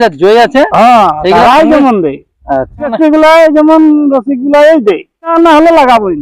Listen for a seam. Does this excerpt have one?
yes; 2 cuts; at 2.9 s, 5.3 s

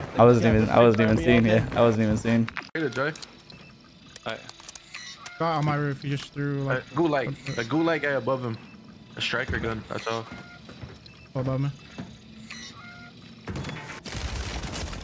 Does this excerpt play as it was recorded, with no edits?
no; 1 cut; at 2.6 s

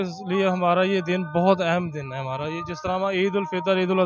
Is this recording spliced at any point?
no; 0 cuts

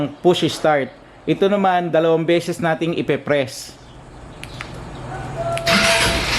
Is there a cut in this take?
no; 0 cuts

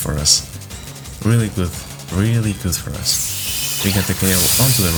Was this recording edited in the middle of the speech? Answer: no; 0 cuts

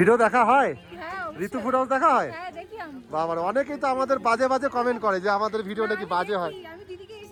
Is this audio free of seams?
yes; 0 cuts

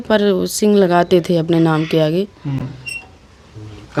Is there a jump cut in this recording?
no; 0 cuts

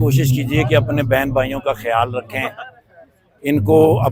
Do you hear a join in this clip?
no; 0 cuts

